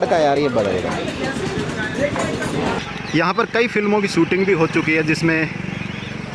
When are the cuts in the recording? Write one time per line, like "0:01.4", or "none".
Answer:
0:02.8